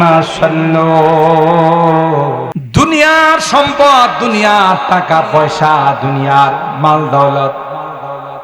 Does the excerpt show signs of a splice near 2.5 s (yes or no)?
yes